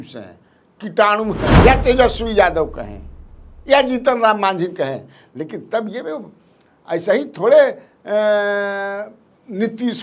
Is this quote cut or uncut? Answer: cut